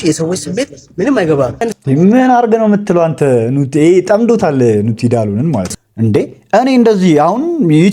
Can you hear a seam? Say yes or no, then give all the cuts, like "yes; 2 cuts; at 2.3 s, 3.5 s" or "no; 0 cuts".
yes; 2 cuts; at 1.6 s, 5.7 s